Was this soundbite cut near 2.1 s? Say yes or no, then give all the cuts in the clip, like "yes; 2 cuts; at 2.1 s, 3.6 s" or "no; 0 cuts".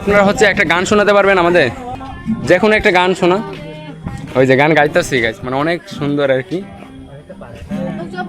yes; 1 cut; at 2.1 s